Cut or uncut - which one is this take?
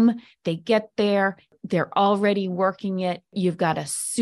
cut